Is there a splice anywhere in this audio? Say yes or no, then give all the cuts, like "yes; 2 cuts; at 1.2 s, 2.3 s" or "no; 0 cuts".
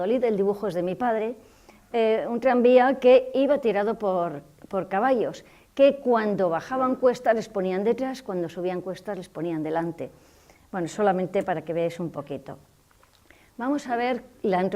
no; 0 cuts